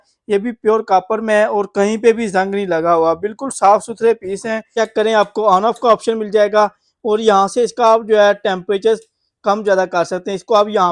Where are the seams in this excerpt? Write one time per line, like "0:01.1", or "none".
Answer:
0:04.7

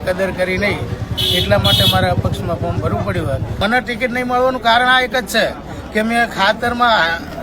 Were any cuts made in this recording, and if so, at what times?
0:03.6

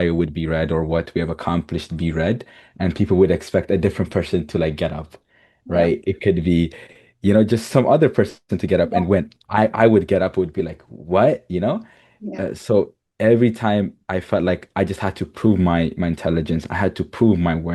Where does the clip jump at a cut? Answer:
none

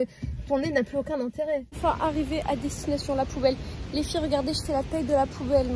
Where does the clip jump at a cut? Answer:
0:01.7

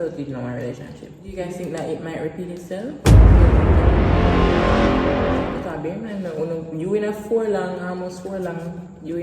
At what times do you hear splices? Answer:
0:01.3
0:05.6

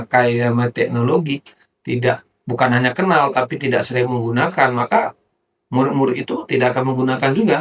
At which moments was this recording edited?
none

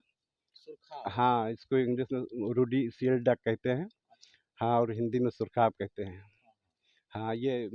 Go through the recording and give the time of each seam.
none

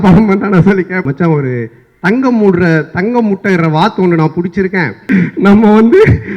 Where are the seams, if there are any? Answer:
0:01.1
0:05.0

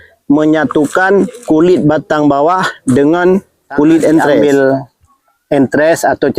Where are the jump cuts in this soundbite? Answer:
0:04.4

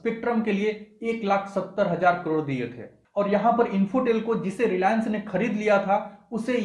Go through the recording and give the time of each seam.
none

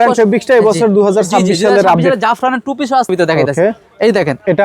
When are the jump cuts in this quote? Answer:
0:03.1

